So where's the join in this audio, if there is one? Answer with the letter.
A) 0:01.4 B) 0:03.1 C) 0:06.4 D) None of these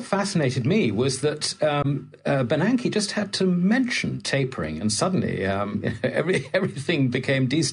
B